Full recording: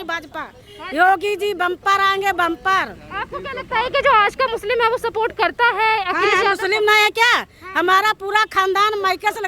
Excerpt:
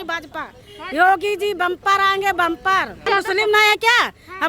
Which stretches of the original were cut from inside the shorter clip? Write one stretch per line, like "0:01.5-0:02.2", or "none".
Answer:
0:03.1-0:06.4